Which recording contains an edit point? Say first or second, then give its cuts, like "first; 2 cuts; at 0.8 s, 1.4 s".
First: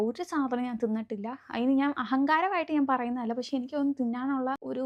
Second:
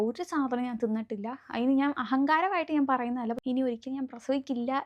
second; 1 cut; at 3.4 s